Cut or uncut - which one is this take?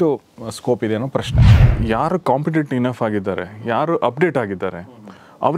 cut